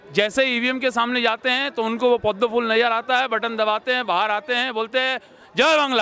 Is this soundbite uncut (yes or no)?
yes